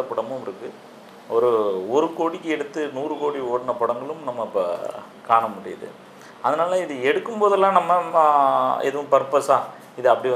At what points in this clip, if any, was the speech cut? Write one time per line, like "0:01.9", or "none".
none